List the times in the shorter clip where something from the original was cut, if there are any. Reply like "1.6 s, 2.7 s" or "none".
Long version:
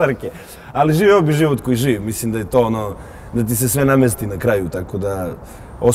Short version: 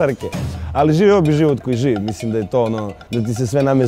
2.9 s